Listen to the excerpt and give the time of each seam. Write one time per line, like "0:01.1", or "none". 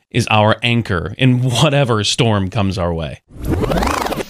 0:03.3